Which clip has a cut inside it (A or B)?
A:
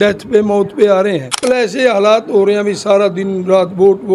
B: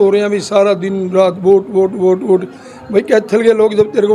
A